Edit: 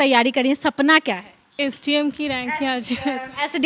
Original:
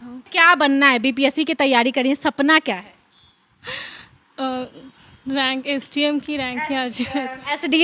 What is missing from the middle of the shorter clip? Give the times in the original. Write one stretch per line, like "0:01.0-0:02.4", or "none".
0:03.2-0:05.6